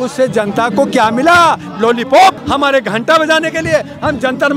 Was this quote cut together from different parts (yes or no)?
yes